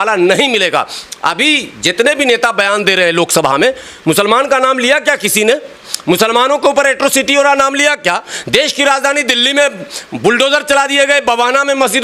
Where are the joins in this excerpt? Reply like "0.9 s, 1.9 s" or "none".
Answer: none